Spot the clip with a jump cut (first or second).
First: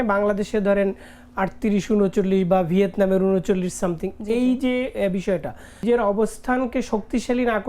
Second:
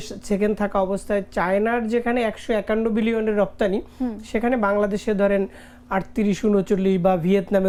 first